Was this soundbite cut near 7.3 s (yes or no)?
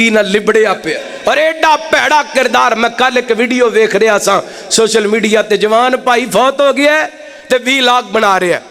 no